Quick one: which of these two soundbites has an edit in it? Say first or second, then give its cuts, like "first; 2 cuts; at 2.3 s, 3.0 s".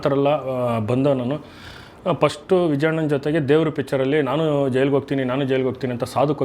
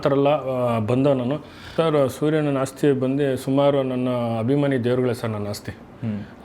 second; 1 cut; at 1.6 s